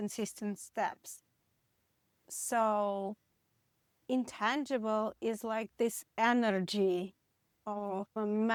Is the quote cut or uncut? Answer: uncut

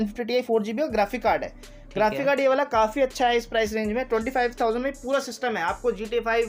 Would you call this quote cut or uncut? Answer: uncut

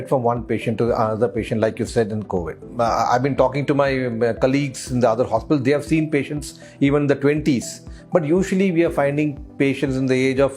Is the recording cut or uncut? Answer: uncut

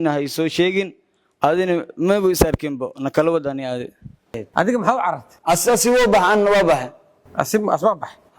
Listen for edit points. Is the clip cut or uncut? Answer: cut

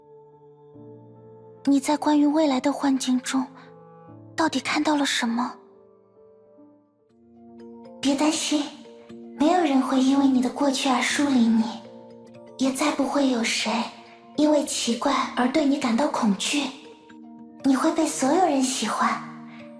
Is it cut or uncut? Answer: cut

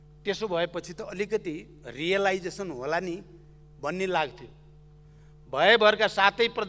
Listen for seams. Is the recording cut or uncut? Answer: uncut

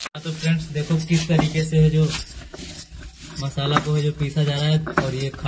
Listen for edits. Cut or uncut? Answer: uncut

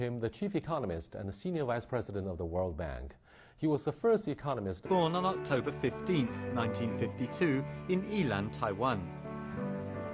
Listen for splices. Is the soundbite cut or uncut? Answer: uncut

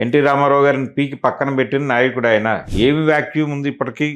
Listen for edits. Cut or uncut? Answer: cut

